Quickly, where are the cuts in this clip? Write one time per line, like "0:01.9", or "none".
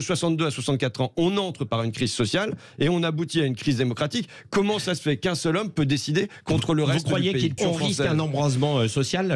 0:07.5

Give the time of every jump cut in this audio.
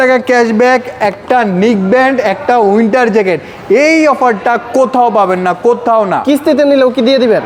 none

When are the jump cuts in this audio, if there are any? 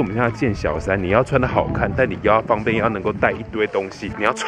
none

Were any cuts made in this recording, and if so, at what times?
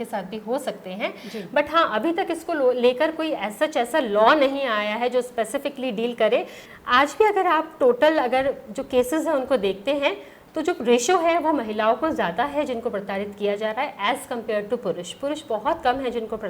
none

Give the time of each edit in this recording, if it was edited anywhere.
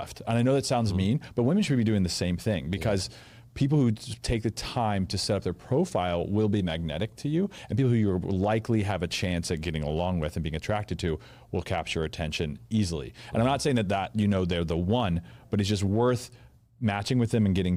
none

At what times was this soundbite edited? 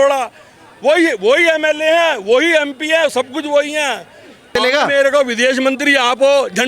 0:04.5

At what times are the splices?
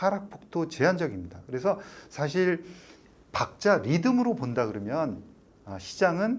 none

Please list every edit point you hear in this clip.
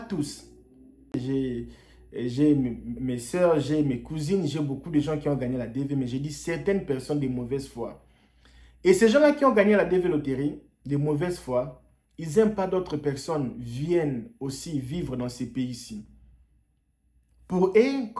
0:01.1

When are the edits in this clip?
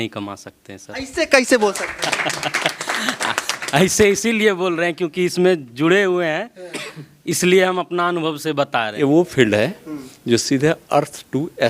0:08.9

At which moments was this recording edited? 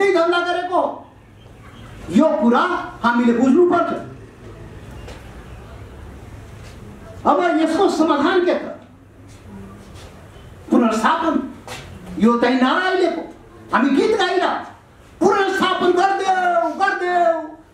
none

